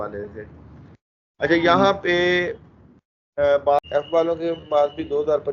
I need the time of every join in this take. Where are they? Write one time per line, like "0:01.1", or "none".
0:03.9